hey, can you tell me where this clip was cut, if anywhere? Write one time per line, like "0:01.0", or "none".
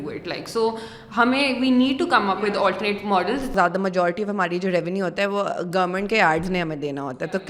0:03.5